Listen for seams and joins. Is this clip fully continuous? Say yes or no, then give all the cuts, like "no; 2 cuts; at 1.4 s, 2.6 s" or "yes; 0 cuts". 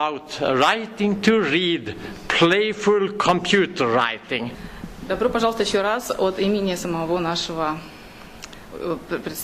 yes; 0 cuts